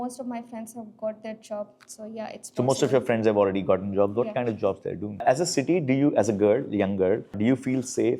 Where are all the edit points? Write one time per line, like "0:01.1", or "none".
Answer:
0:05.2